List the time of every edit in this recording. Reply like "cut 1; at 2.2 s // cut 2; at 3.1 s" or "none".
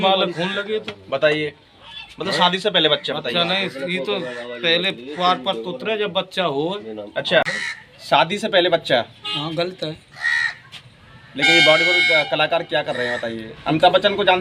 cut 1; at 7.5 s